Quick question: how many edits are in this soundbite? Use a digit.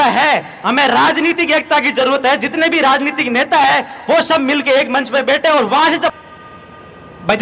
1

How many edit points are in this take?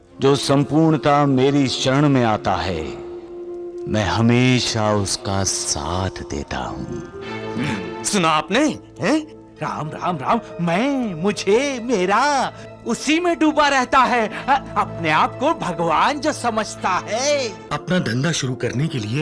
1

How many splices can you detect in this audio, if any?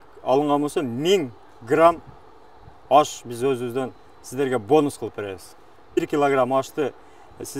1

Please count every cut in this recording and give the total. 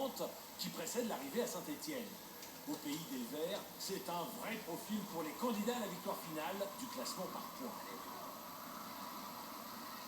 1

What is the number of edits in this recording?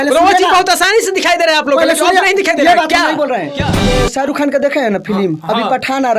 1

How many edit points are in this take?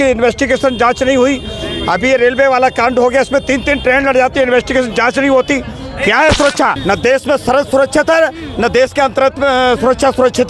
1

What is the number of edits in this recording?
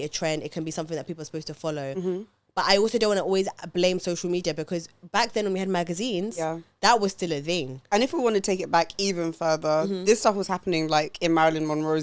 0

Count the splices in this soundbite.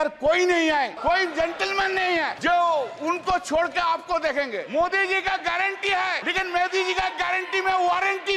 4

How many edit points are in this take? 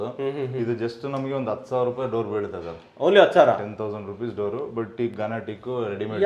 0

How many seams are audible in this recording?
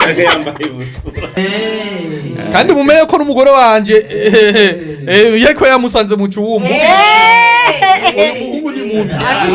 1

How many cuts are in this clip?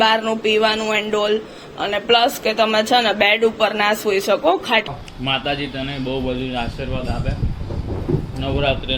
1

